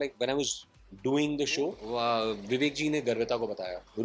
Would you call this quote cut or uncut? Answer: cut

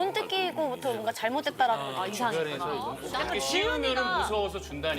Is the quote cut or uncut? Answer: cut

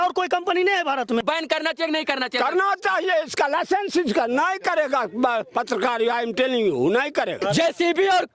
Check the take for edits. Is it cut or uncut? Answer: cut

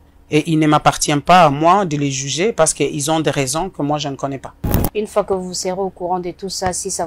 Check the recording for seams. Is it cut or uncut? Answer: cut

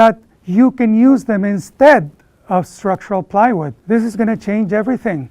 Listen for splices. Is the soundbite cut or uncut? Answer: cut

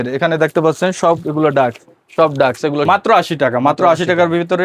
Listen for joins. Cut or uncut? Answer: cut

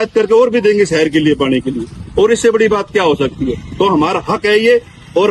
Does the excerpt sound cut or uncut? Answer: uncut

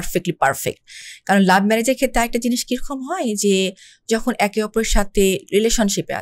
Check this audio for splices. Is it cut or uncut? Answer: uncut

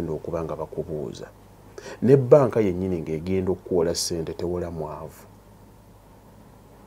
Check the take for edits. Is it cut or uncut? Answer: uncut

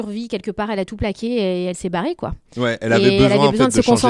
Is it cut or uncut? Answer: uncut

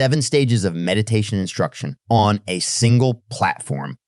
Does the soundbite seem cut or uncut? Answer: cut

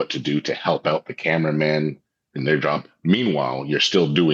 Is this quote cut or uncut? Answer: cut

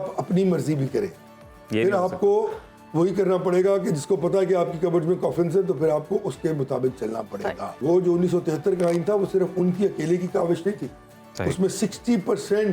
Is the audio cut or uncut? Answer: cut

